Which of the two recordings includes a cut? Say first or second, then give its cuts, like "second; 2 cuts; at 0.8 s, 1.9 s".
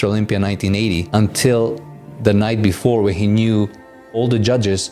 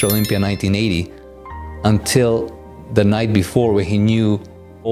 first; 1 cut; at 1.0 s